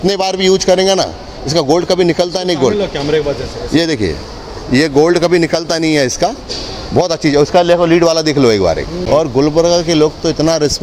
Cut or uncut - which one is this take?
uncut